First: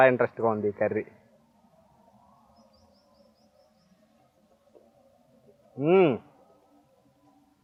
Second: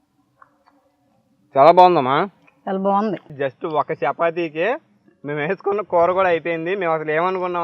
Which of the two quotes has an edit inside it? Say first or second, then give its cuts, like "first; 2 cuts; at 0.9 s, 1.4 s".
second; 1 cut; at 3.3 s